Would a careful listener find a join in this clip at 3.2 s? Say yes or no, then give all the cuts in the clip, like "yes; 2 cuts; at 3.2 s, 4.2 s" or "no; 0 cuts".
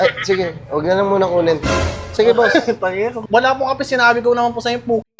yes; 1 cut; at 3.2 s